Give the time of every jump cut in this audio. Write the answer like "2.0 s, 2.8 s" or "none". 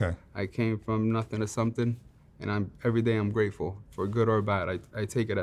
none